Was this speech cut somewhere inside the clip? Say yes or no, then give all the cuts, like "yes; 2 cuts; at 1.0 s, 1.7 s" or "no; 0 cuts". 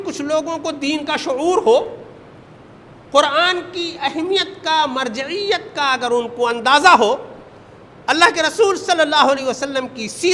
no; 0 cuts